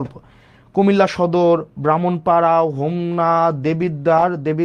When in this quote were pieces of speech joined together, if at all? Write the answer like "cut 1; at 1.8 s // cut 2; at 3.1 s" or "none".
none